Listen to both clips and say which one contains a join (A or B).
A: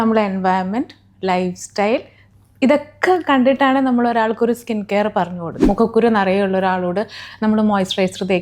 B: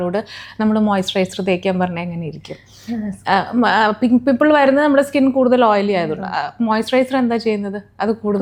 A